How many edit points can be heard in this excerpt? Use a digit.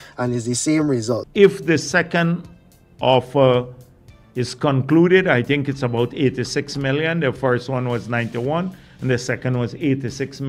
1